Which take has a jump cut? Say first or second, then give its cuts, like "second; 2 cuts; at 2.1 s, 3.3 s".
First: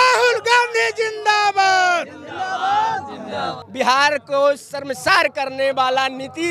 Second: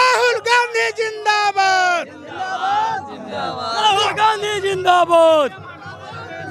first; 1 cut; at 3.6 s